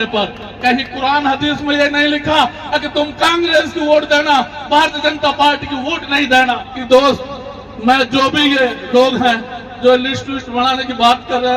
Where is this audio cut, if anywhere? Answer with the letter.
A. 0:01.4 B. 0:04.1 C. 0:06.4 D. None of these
C